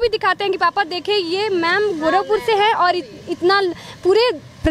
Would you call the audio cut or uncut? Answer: uncut